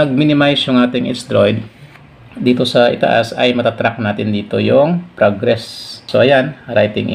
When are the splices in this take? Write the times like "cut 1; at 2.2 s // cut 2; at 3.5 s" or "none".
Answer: cut 1; at 6.0 s